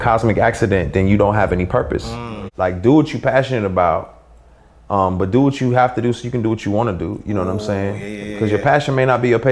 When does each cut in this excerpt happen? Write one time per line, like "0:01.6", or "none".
0:02.1